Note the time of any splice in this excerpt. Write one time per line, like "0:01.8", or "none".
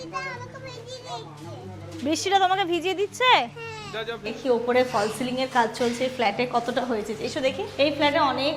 0:04.3
0:07.7